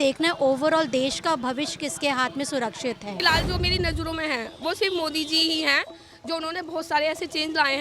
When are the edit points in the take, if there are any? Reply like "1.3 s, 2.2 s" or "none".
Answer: 3.2 s